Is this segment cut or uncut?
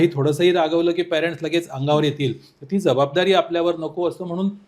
uncut